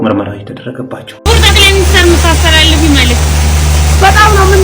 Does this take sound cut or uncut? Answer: cut